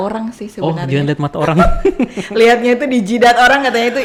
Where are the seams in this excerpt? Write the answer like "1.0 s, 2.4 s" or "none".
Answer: none